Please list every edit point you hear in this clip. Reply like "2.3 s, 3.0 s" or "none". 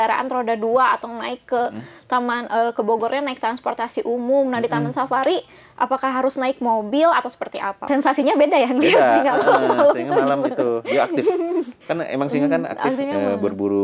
7.8 s